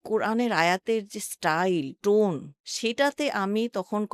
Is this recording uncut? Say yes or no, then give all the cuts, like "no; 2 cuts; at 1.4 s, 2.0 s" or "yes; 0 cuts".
yes; 0 cuts